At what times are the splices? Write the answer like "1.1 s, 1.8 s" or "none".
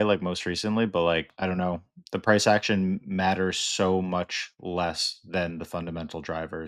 1.3 s